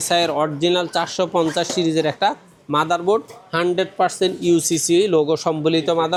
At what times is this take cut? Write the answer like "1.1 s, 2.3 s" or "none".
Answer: none